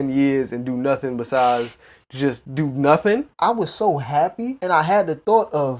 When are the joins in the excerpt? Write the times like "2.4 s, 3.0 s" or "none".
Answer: 3.3 s, 4.6 s